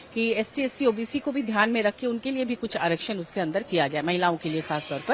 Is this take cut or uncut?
uncut